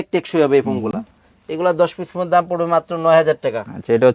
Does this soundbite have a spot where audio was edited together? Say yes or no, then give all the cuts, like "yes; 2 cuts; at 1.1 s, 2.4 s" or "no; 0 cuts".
no; 0 cuts